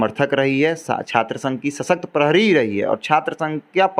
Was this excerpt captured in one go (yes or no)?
yes